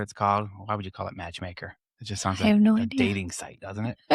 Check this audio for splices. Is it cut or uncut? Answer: uncut